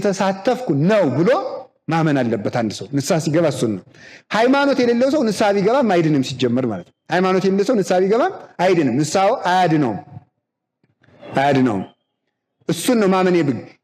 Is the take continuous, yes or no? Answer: yes